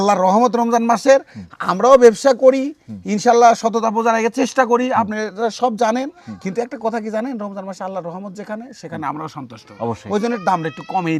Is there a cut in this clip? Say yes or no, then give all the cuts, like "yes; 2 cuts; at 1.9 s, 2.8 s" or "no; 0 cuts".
no; 0 cuts